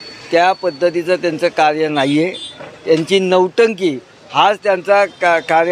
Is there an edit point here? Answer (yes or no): no